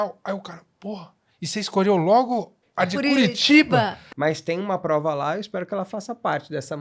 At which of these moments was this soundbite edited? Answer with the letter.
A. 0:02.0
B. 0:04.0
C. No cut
B